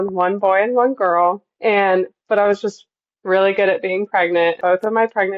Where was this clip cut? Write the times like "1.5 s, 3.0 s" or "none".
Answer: 1.5 s, 4.6 s